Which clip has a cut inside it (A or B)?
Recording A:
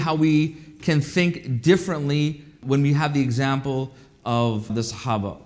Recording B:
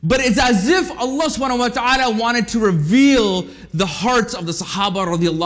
A